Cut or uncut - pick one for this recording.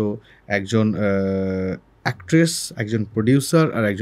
uncut